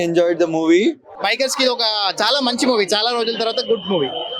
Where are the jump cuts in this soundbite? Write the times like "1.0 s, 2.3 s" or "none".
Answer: 1.1 s